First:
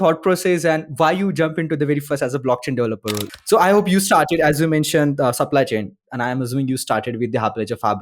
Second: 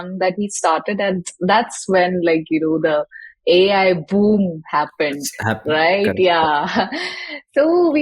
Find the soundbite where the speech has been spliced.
first; 1 cut; at 3.2 s

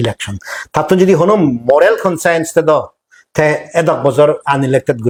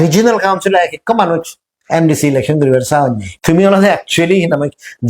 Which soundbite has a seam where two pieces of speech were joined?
second; 1 cut; at 3.3 s

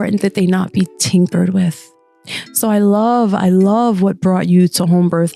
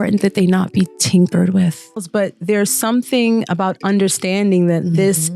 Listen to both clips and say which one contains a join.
second; 1 cut; at 2.1 s

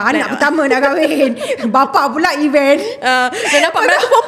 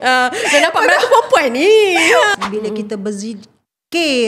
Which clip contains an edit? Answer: second; 1 cut; at 2.3 s

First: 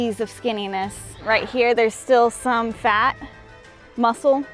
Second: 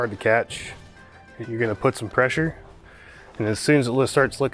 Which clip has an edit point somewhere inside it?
second; 1 cut; at 1.3 s

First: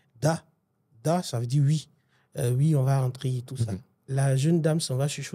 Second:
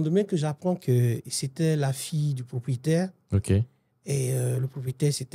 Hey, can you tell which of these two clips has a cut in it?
first; 1 cut; at 4.0 s

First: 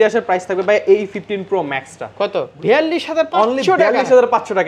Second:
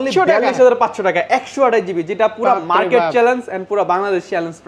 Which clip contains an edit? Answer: first; 1 cut; at 2.5 s

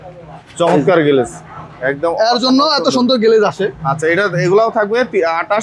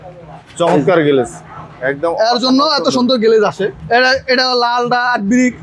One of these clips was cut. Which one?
second; 1 cut; at 3.8 s

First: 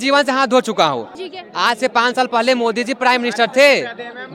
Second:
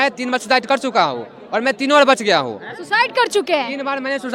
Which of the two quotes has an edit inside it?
first; 1 cut; at 1.1 s

